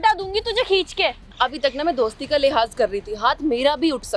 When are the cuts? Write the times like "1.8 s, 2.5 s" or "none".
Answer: 1.3 s